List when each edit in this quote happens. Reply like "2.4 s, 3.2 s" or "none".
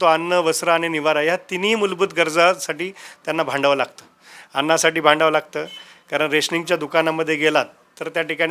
none